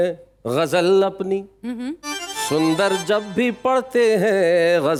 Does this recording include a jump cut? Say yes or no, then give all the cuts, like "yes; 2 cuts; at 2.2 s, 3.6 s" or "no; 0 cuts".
no; 0 cuts